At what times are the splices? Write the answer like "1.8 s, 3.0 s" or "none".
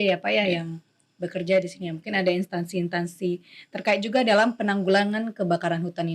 none